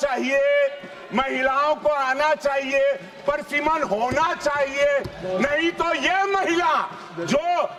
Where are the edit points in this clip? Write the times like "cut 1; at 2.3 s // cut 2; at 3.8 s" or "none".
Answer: none